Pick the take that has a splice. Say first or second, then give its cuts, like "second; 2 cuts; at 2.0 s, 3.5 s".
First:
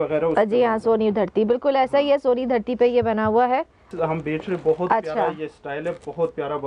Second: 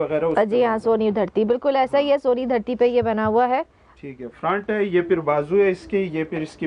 first; 1 cut; at 3.9 s